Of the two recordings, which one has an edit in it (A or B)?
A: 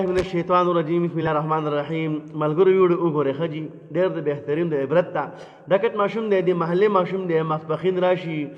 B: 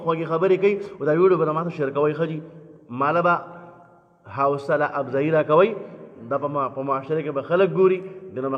A